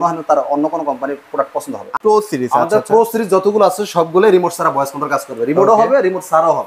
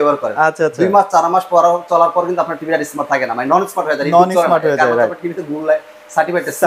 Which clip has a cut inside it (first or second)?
first